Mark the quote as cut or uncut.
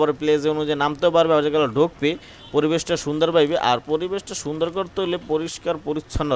uncut